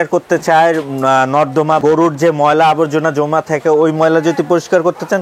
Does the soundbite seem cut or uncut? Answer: uncut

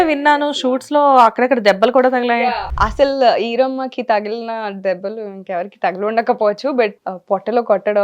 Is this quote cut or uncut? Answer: cut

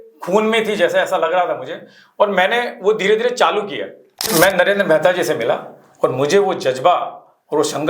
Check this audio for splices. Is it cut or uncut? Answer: cut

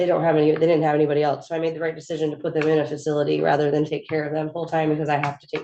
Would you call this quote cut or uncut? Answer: uncut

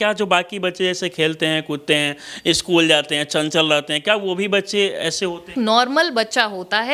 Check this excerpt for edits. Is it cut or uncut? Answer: uncut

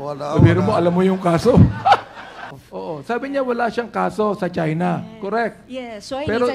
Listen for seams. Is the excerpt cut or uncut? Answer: cut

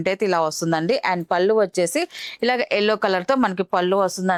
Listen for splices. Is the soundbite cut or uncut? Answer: uncut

